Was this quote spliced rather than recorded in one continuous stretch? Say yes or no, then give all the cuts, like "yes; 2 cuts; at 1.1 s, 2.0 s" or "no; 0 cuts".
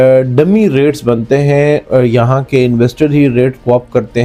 no; 0 cuts